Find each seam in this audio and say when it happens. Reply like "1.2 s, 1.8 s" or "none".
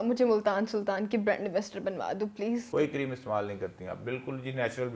2.7 s